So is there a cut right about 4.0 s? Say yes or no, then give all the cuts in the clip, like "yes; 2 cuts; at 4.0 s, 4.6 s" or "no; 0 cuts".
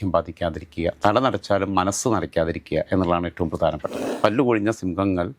yes; 1 cut; at 4.0 s